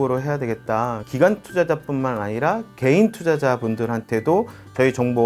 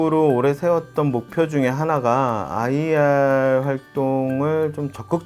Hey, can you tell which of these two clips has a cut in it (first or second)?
first